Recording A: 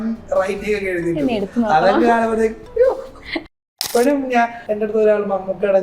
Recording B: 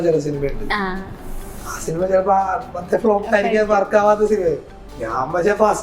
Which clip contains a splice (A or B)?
A